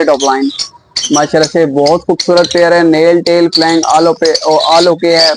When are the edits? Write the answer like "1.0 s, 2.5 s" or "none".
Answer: none